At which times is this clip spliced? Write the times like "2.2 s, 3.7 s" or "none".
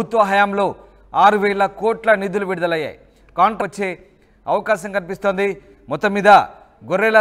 3.6 s